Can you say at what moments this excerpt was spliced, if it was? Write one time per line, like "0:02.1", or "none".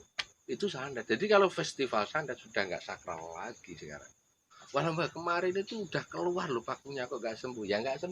0:04.6